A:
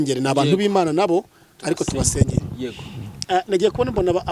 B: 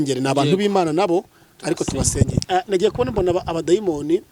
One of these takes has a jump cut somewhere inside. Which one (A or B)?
B